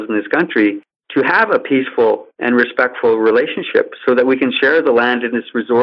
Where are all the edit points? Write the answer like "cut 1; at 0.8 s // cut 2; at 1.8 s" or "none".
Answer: cut 1; at 0.9 s // cut 2; at 2.3 s